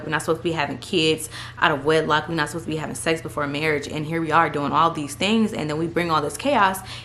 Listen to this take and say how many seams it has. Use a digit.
0